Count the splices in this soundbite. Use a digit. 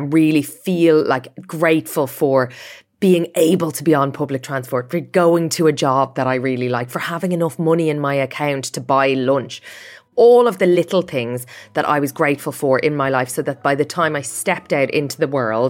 2